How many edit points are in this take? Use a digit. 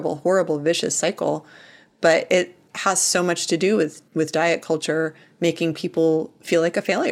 1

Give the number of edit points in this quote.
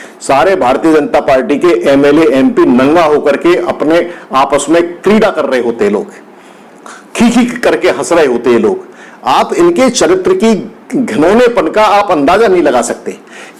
0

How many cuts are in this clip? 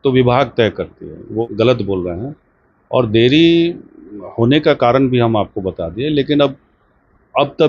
1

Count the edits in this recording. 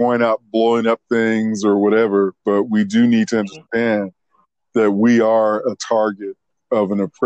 0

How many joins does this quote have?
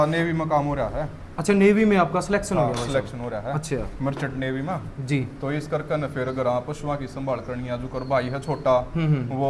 0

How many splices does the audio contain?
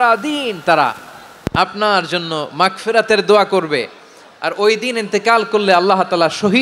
0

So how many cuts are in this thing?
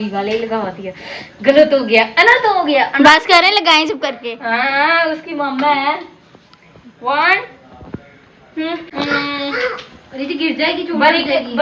0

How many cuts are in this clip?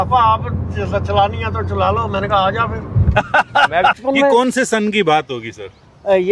1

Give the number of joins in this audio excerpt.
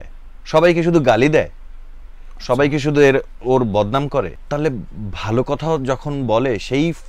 1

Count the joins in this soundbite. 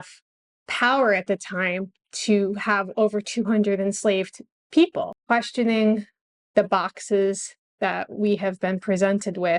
1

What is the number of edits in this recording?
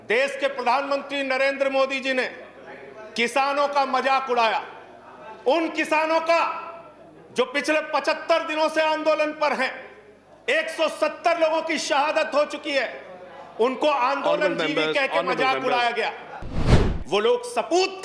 1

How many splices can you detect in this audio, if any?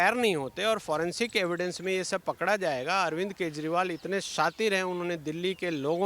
0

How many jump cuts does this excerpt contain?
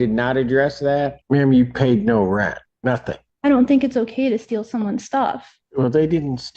3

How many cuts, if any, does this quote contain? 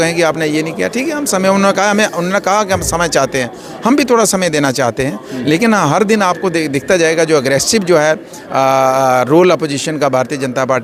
0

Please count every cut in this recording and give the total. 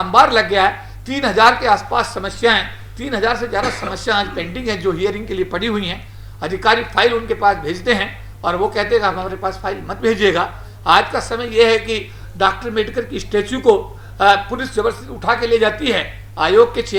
0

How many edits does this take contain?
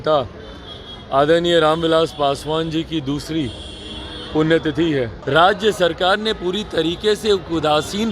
1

